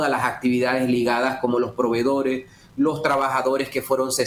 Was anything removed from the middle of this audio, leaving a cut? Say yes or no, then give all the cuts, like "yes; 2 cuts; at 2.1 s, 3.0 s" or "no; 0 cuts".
no; 0 cuts